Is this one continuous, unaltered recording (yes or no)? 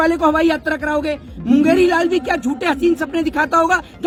yes